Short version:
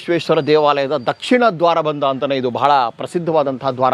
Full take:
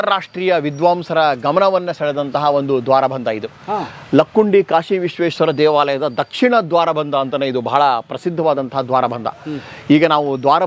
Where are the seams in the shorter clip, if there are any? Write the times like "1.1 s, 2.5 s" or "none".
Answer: none